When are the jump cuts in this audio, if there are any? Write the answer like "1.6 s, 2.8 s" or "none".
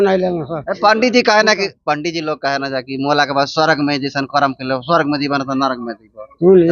none